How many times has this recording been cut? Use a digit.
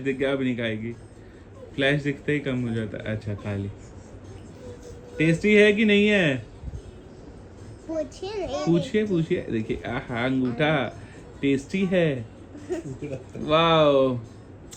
0